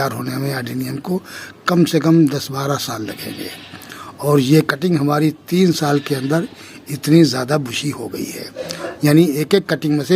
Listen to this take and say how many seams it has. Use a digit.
1